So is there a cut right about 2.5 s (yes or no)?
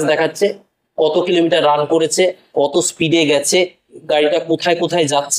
no